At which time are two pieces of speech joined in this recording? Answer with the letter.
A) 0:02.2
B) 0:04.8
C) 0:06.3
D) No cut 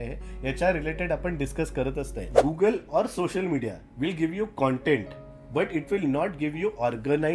A